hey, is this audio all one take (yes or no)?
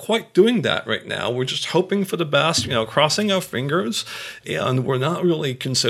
yes